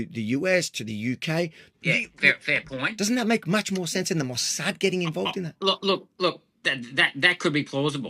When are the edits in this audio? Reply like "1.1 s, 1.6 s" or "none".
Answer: 1.6 s, 2.9 s